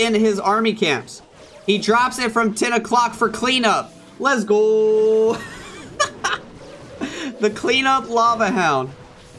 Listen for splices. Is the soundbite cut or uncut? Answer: uncut